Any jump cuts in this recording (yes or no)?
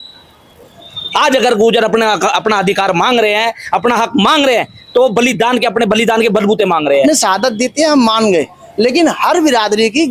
yes